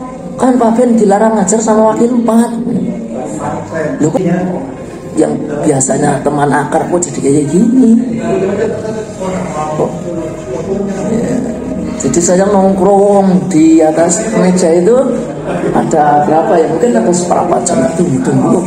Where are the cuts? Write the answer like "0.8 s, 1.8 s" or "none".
4.2 s